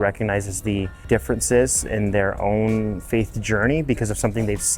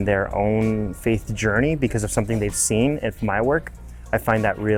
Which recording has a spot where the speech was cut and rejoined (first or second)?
first